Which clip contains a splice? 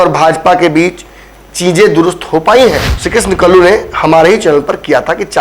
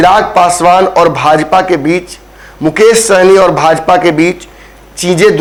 first; 1 cut; at 2.9 s

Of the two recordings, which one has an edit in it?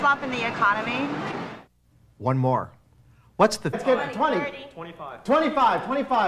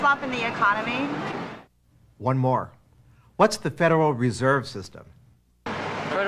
second; 1 cut; at 3.7 s

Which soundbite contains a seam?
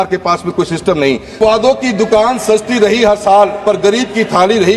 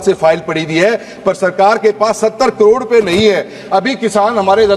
first; 1 cut; at 1.4 s

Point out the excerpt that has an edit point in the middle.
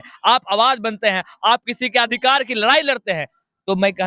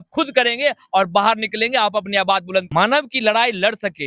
second; 1 cut; at 2.7 s

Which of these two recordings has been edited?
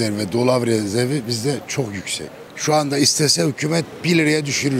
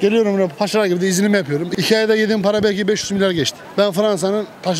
second; 2 cuts; at 1.7 s, 3.6 s

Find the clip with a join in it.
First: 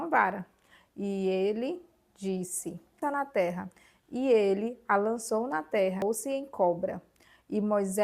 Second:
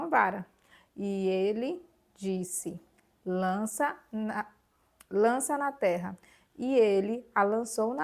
first; 2 cuts; at 3.0 s, 6.0 s

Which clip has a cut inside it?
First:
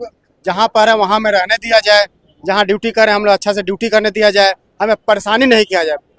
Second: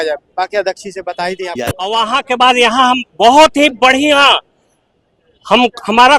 second; 1 cut; at 1.7 s

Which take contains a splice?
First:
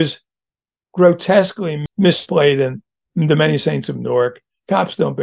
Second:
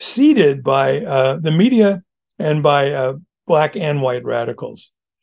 first; 1 cut; at 2.2 s

